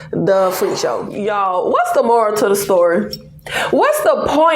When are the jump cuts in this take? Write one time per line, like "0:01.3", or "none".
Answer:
0:01.0